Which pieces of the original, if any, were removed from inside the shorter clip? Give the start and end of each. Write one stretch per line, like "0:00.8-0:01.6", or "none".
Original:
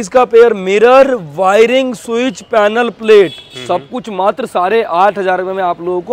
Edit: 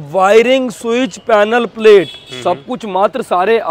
none